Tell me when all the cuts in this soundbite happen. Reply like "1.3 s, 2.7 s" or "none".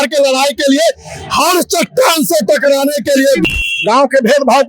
3.4 s